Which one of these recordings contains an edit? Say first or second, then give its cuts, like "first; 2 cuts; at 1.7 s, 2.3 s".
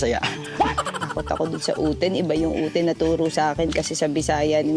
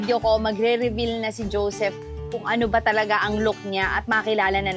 first; 1 cut; at 0.9 s